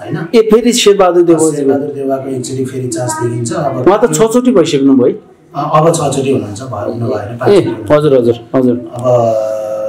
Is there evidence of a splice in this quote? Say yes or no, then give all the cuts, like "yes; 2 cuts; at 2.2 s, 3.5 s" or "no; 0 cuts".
no; 0 cuts